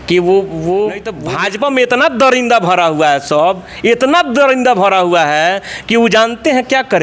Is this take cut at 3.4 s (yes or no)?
no